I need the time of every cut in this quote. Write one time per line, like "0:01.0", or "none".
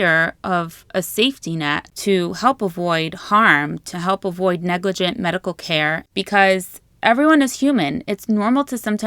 0:01.9
0:06.0

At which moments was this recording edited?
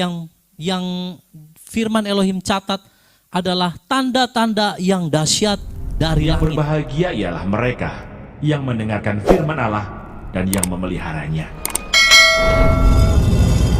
0:06.2

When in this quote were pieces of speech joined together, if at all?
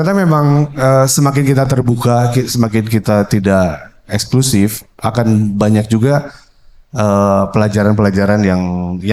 none

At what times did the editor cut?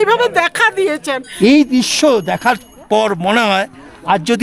0:01.2

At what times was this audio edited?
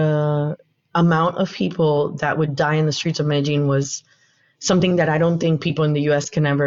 none

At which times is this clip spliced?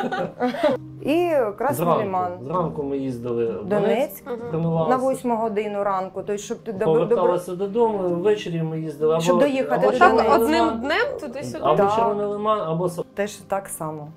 0:00.8
0:13.0

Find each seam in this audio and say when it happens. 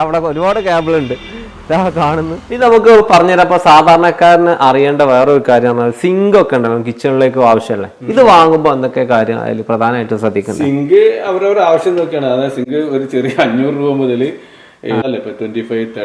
0:02.7
0:15.0

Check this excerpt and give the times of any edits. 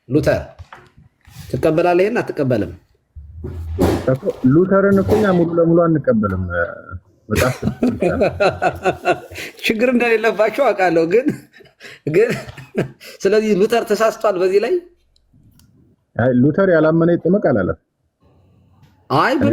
none

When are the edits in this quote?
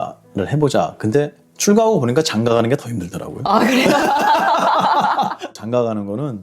0:05.5

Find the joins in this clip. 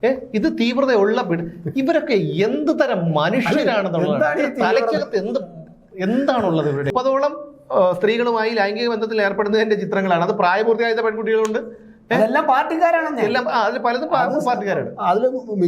0:06.9

